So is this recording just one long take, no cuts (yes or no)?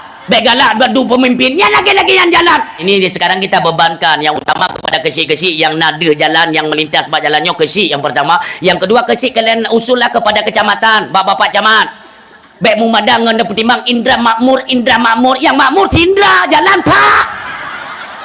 no